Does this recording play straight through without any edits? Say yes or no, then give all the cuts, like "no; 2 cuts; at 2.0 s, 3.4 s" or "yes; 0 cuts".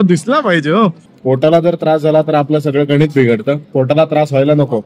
no; 1 cut; at 1.1 s